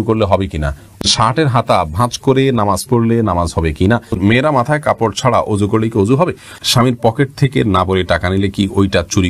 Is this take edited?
yes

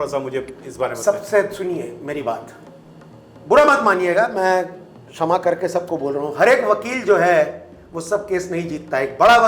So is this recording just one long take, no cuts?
yes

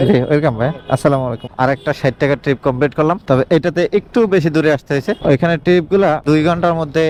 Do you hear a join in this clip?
no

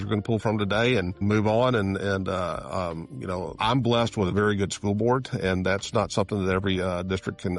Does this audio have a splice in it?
yes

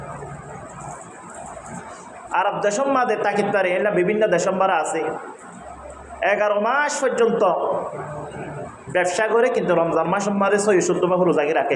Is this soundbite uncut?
yes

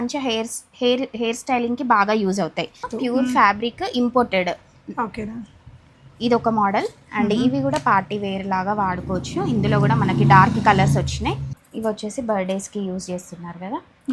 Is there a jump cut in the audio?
yes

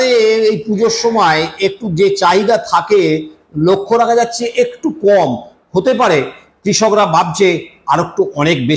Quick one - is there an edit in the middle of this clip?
no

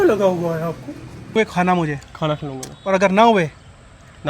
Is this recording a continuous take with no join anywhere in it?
no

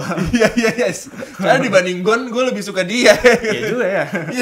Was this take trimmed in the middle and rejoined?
no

